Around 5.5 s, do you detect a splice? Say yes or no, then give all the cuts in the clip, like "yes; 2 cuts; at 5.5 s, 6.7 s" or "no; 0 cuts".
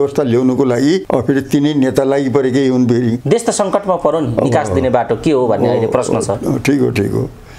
no; 2 cuts; at 1.0 s, 3.2 s